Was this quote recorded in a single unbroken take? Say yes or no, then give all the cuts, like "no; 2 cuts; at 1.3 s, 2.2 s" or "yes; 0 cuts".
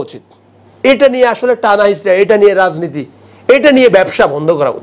yes; 0 cuts